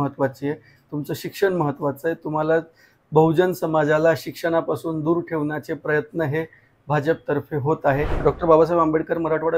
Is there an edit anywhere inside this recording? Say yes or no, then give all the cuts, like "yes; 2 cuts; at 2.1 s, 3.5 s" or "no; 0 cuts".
yes; 1 cut; at 8.2 s